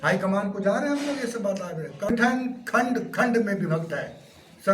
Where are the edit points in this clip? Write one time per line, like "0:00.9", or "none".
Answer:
0:02.1